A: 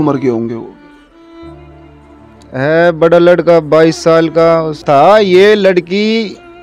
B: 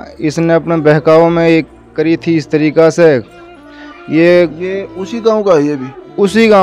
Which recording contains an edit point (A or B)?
A